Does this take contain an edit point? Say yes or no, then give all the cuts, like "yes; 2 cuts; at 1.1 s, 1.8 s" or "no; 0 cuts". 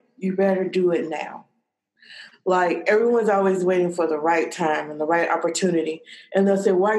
no; 0 cuts